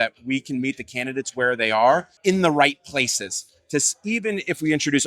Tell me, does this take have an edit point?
yes; 1 cut; at 2.1 s

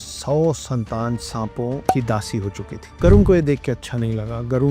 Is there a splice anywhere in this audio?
yes; 1 cut; at 1.9 s

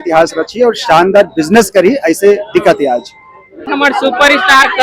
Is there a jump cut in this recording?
yes; 1 cut; at 3.6 s

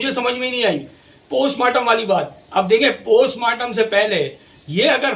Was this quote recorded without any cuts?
yes; 0 cuts

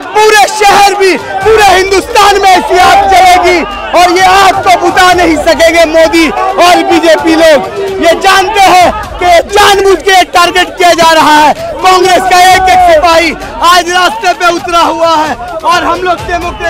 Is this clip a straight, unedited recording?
yes; 0 cuts

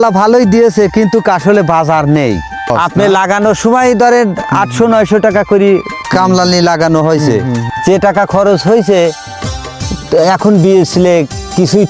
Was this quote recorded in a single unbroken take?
no; 2 cuts; at 2.7 s, 7.7 s

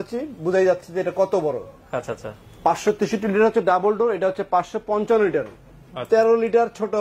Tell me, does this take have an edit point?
no; 0 cuts

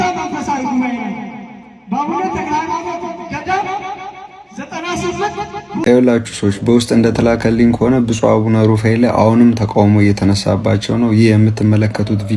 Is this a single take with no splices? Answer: no; 1 cut; at 5.8 s

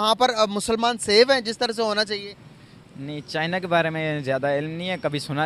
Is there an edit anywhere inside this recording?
no; 0 cuts

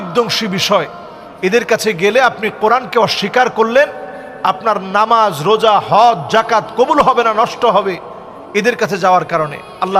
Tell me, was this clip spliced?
no; 0 cuts

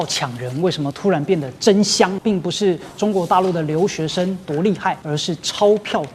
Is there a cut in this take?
yes; 2 cuts; at 2.2 s, 5.0 s

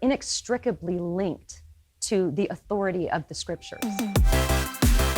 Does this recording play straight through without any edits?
no; 1 cut; at 3.7 s

